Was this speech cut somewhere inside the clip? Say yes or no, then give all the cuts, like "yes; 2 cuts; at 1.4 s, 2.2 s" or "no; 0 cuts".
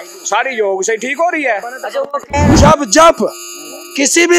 yes; 1 cut; at 2.5 s